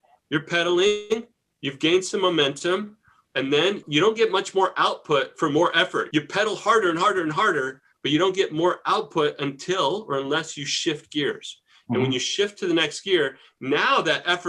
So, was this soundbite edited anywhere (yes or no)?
yes